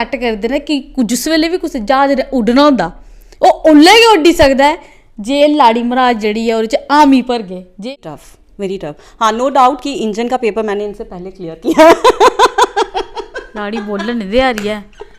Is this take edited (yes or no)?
yes